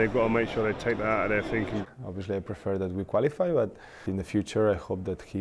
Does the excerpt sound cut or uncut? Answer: cut